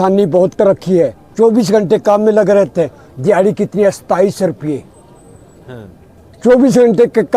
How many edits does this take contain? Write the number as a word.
one